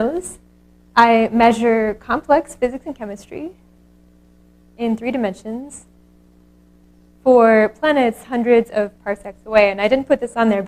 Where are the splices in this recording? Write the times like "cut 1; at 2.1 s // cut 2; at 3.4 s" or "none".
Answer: cut 1; at 2.1 s